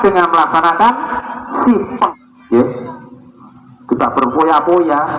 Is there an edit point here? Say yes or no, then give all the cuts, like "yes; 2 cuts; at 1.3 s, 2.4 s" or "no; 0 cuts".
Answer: yes; 1 cut; at 2.1 s